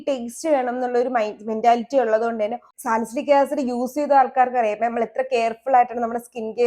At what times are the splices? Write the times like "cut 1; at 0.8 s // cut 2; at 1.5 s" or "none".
cut 1; at 2.7 s

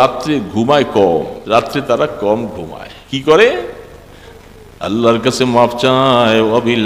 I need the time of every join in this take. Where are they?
cut 1; at 1.4 s

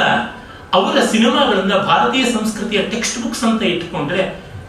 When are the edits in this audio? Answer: none

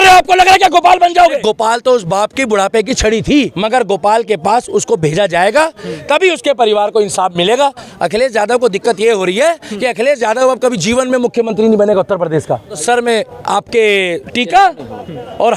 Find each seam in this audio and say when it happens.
cut 1; at 1.4 s // cut 2; at 3.5 s // cut 3; at 7.8 s // cut 4; at 12.8 s

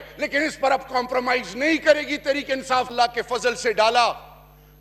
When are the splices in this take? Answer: cut 1; at 2.9 s

